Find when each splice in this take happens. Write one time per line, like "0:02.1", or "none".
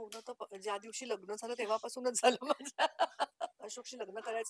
0:03.6